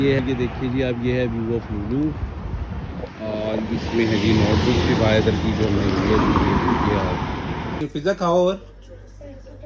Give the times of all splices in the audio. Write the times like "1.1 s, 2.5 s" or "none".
7.8 s